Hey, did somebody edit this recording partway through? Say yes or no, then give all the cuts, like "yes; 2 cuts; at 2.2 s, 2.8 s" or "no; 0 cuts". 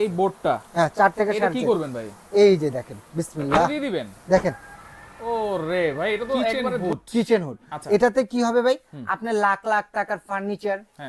yes; 1 cut; at 6.7 s